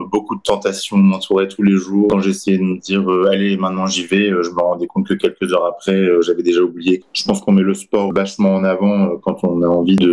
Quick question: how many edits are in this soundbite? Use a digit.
2